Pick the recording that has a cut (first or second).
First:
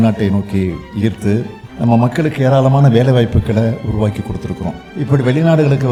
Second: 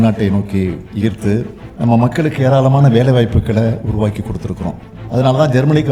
second